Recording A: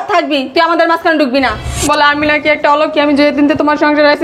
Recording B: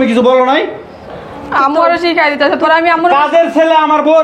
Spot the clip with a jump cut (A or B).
A